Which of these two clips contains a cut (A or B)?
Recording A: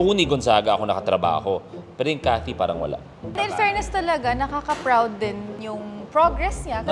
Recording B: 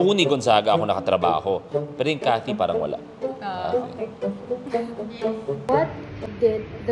A